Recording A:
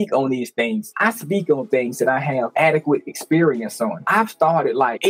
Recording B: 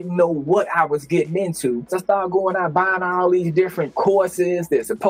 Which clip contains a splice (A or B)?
B